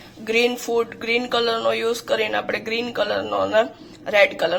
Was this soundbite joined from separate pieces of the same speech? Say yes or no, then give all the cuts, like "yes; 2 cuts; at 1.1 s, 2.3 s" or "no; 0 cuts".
no; 0 cuts